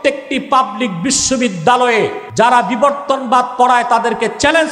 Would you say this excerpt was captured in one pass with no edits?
no; 1 cut; at 2.2 s

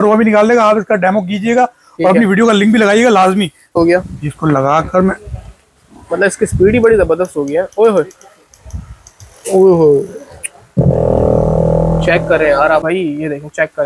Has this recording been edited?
yes; 2 cuts; at 3.7 s, 12.9 s

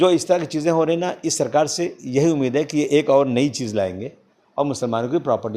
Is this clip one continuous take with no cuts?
yes; 0 cuts

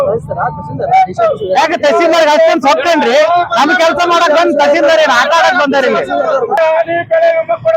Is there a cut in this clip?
yes; 1 cut; at 6.6 s

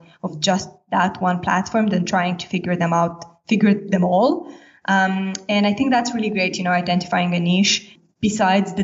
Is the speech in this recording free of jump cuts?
yes; 0 cuts

